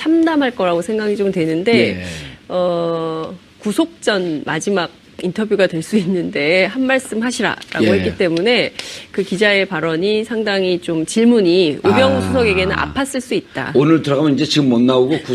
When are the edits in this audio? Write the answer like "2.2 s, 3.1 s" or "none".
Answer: 10.3 s